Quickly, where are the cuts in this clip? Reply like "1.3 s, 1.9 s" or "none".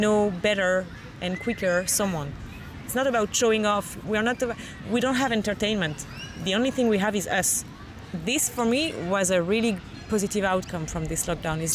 2.8 s, 7.9 s